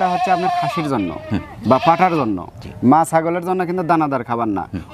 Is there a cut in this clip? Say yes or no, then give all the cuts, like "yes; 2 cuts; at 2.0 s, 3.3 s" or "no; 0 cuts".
no; 0 cuts